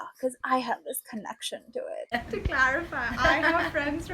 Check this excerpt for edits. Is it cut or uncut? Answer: cut